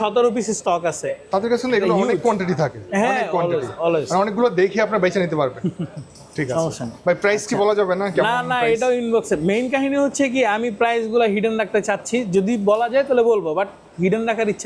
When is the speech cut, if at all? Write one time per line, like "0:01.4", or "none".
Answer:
none